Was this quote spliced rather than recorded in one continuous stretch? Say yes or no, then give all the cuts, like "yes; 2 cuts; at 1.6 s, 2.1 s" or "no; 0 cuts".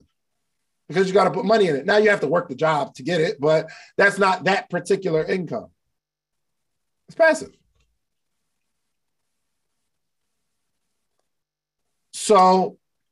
no; 0 cuts